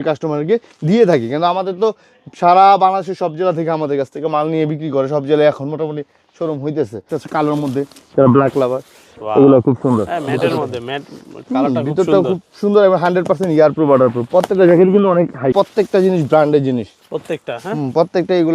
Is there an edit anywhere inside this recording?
yes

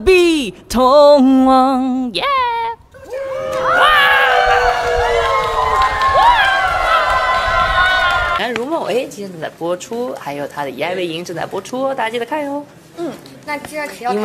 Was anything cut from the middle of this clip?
yes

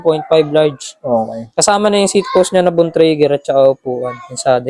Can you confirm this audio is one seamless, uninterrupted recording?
yes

